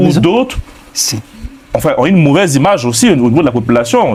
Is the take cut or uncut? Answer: uncut